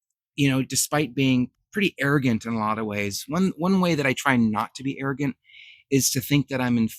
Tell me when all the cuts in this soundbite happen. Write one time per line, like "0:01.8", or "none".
none